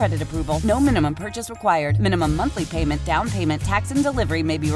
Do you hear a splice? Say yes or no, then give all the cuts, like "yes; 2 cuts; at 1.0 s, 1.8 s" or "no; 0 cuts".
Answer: no; 0 cuts